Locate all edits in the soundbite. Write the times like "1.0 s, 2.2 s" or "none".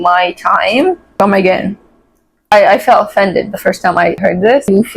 2.5 s, 4.3 s

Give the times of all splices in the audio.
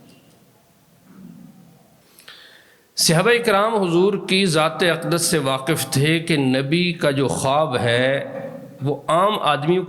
2.0 s

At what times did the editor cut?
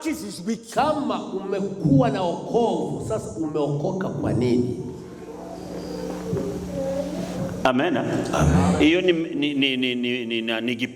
none

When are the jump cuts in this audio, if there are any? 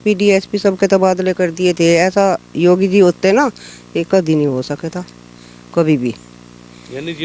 none

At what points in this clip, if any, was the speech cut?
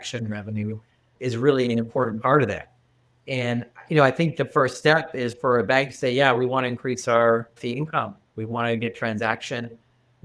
7.6 s

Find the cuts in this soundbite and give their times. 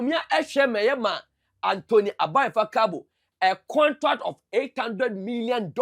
none

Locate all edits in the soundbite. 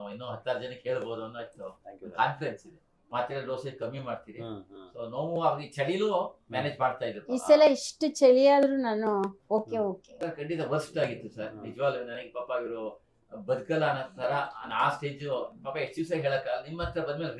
3.0 s, 10.1 s

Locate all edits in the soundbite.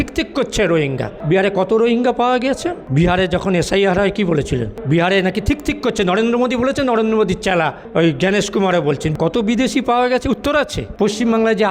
1.1 s, 2.8 s, 4.7 s, 9.1 s, 10.8 s

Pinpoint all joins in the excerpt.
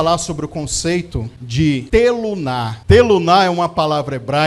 1.6 s, 2.7 s

